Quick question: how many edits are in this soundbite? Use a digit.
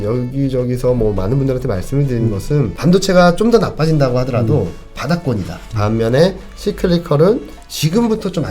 2